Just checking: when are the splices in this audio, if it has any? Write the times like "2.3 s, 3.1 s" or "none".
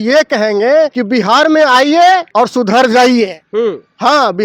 1.0 s, 2.3 s

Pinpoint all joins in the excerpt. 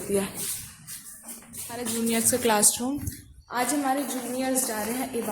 1.9 s

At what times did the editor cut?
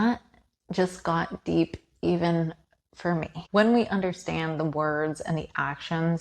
3.3 s

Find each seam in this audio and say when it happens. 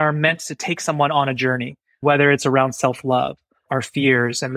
2.0 s, 3.7 s

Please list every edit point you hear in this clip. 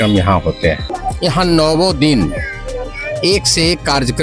0.9 s

